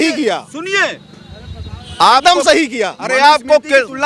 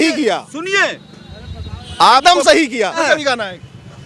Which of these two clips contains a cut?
second; 1 cut; at 2.9 s

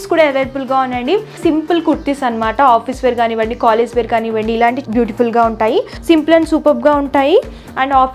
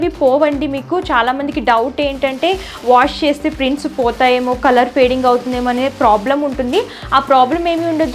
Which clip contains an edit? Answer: first; 2 cuts; at 1.4 s, 5.9 s

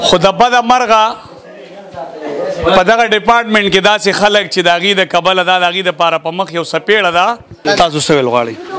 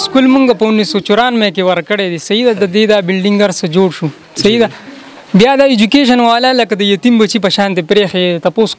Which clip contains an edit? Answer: first; 1 cut; at 7.6 s

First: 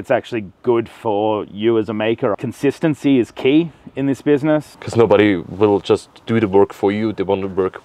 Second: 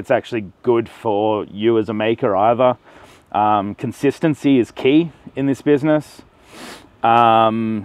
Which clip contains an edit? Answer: first; 2 cuts; at 2.3 s, 4.8 s

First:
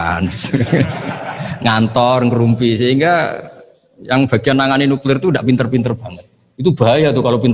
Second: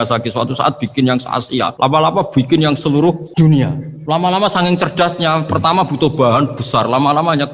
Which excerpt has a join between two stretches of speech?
second; 2 cuts; at 1.7 s, 3.5 s

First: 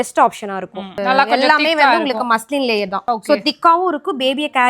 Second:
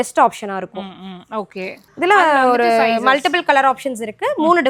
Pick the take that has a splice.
first; 1 cut; at 1.0 s

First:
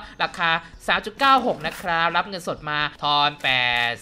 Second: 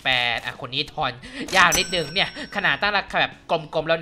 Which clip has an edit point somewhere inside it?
first; 1 cut; at 2.9 s

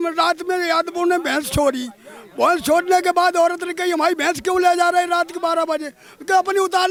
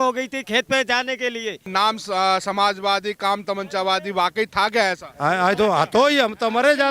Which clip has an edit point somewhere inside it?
second; 1 cut; at 1.7 s

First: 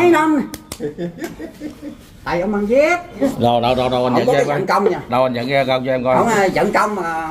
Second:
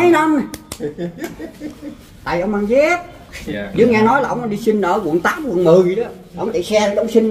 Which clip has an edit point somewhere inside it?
first; 1 cut; at 3.2 s

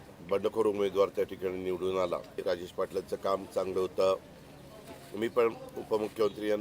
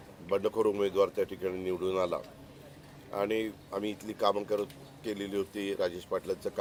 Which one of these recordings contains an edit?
first; 1 cut; at 2.4 s

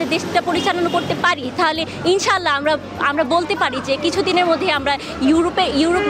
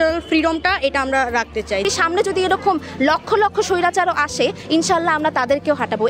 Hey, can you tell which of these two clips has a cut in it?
second; 1 cut; at 1.9 s

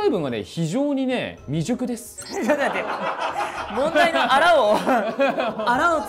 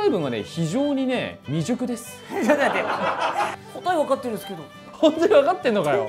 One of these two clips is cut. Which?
second; 2 cuts; at 3.6 s, 4.8 s

